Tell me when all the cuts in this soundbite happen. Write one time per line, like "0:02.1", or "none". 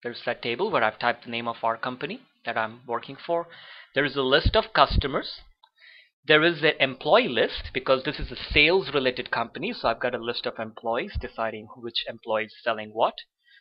none